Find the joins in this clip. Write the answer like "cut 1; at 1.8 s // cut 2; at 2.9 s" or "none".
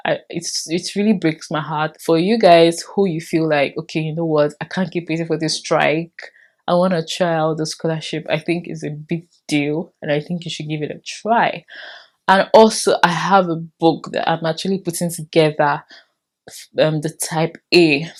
none